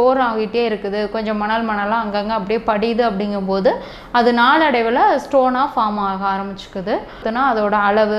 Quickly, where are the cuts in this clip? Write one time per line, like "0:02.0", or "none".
0:07.2